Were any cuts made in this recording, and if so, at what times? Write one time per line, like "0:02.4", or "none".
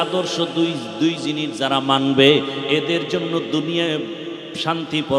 none